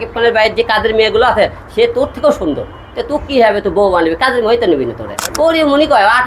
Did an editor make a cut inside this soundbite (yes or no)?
no